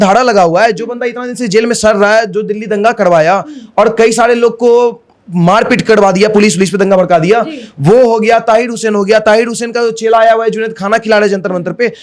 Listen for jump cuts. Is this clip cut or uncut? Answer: uncut